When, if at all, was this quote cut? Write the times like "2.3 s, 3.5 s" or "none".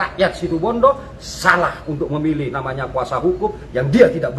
none